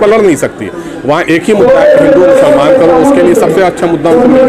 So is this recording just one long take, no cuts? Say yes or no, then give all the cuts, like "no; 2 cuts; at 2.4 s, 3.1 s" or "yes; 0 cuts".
yes; 0 cuts